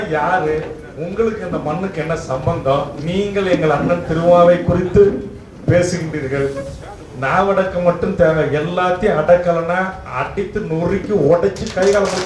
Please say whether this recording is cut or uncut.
uncut